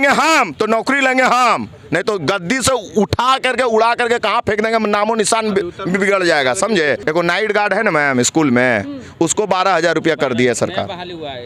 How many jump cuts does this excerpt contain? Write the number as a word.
one